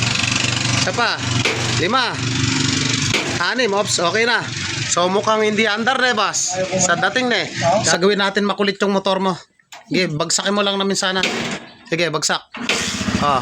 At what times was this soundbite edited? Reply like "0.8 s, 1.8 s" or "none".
7.9 s